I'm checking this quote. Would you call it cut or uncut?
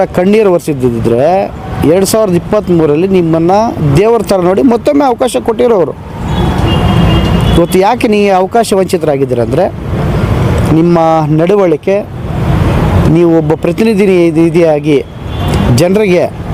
uncut